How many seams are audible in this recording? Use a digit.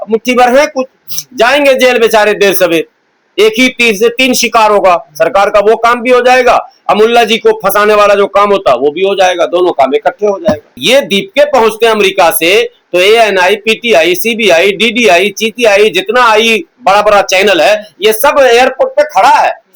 1